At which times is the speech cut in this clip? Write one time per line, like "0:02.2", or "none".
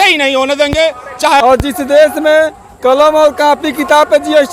0:01.4